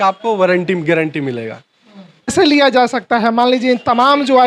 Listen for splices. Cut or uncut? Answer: cut